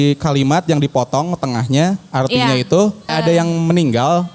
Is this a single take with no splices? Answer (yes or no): no